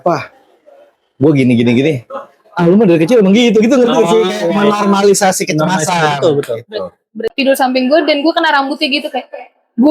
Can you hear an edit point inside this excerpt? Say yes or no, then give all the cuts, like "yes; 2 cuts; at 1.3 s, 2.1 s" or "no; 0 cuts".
yes; 1 cut; at 7.2 s